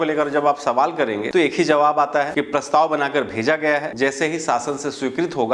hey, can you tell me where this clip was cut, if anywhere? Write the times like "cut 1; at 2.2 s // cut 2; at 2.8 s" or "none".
cut 1; at 1.2 s // cut 2; at 2.3 s // cut 3; at 3.9 s